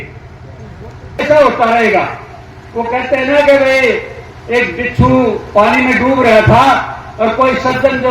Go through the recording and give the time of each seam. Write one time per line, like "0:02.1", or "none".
0:01.2